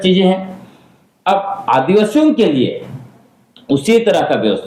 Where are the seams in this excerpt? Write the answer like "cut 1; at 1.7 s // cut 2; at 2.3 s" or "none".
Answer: none